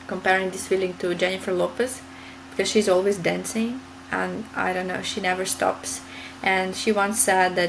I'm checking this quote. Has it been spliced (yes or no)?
no